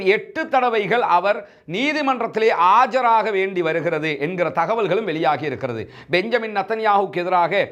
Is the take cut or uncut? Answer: uncut